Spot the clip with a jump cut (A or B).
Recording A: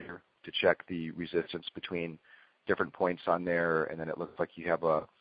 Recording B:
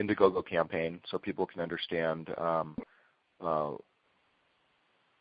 A